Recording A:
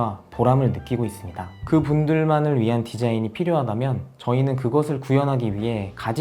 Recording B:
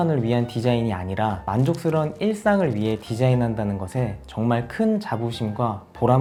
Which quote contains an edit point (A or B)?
A